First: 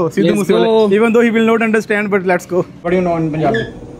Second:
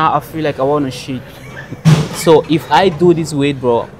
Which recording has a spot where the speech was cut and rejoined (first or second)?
first